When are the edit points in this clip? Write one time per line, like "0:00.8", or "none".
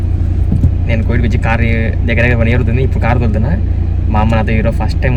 none